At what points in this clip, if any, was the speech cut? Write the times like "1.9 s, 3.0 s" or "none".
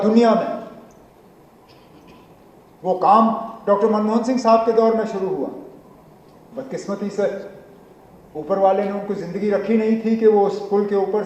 none